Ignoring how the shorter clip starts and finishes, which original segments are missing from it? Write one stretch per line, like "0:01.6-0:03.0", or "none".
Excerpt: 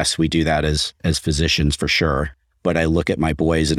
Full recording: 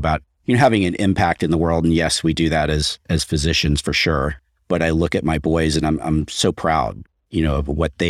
none